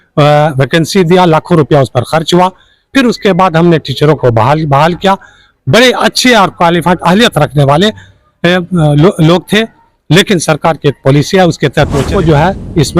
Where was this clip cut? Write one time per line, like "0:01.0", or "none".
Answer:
0:12.1